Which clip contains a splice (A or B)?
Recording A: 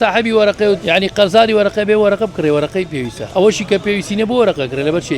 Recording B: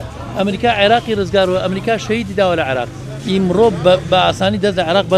A